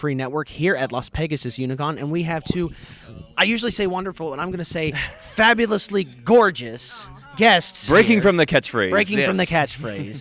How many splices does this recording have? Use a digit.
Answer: 1